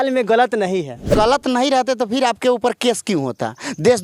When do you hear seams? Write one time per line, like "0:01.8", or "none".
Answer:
0:01.1